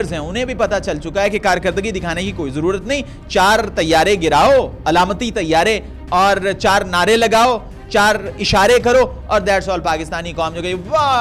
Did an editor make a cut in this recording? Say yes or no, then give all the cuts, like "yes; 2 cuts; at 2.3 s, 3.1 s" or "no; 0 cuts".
no; 0 cuts